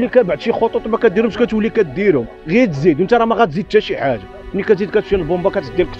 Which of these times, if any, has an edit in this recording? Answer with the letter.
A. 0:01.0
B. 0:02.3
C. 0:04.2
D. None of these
B